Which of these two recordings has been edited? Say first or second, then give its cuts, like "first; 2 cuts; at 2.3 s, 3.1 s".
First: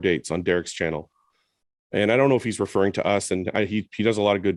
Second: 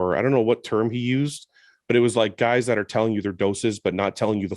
second; 1 cut; at 3.3 s